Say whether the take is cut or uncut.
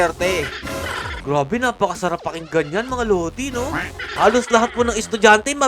cut